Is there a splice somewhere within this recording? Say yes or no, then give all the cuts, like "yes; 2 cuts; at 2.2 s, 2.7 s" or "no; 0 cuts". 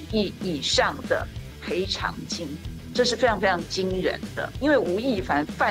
yes; 1 cut; at 4.4 s